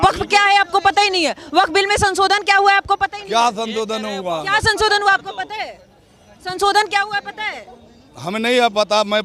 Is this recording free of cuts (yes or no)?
yes